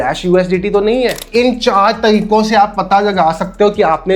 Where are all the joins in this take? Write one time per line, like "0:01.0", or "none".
0:01.2